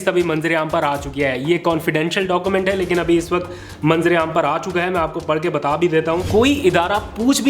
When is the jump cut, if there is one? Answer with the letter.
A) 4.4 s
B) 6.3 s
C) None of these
B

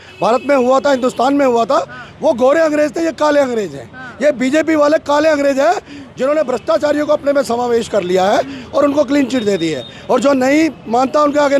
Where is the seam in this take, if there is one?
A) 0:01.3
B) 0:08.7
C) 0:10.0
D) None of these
D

